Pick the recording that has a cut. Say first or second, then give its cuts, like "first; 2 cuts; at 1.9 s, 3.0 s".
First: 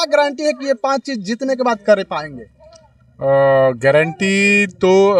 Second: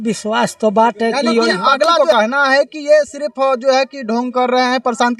second; 1 cut; at 2.0 s